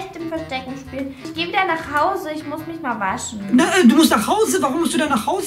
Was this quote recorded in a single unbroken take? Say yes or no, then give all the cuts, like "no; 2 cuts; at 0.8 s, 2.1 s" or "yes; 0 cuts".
no; 1 cut; at 1.3 s